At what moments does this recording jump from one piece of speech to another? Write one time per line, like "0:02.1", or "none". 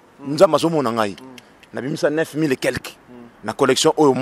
none

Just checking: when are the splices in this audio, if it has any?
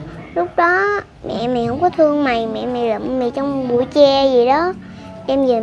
none

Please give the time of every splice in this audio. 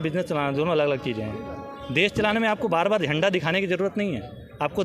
none

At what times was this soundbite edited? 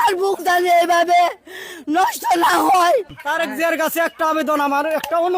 0:03.2

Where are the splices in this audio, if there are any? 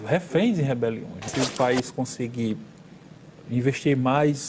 0:01.2

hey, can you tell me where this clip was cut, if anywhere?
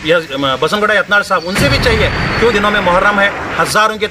0:02.5

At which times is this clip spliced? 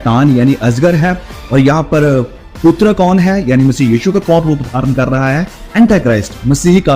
none

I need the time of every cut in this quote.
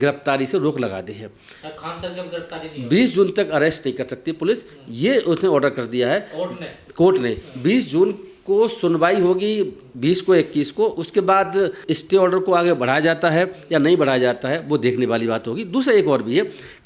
none

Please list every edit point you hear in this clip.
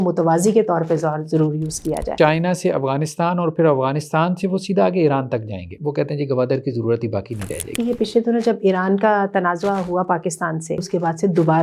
0:02.1
0:05.8
0:07.8
0:10.8

